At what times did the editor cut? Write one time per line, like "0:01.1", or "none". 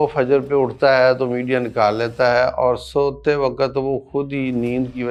none